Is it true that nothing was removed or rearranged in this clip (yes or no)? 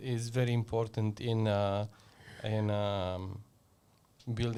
yes